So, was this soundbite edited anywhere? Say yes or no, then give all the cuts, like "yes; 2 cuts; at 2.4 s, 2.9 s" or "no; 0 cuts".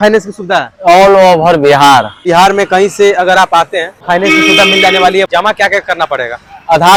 no; 0 cuts